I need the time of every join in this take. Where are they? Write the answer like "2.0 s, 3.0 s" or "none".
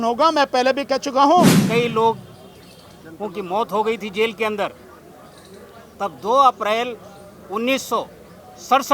1.6 s